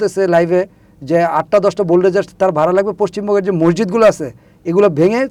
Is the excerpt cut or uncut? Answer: uncut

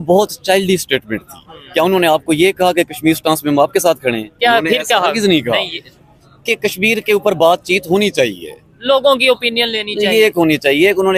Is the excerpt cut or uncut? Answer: uncut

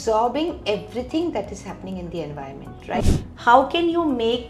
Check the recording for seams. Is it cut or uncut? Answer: cut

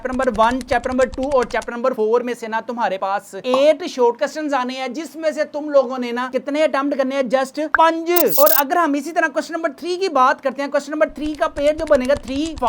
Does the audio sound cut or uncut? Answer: uncut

